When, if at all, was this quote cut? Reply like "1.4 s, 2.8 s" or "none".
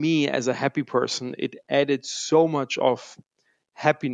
none